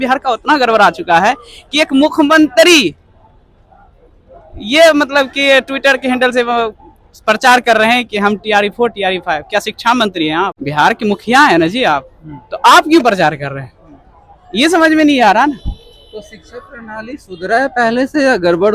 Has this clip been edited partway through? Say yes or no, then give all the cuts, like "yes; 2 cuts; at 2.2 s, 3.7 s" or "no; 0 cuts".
no; 0 cuts